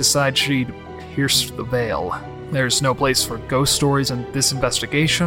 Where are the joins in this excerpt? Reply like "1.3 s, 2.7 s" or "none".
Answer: 2.3 s, 4.1 s